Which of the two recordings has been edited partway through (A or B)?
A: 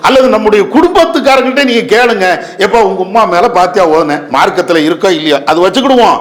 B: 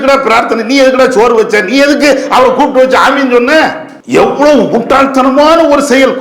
B